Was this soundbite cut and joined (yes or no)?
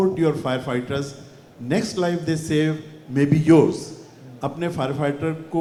no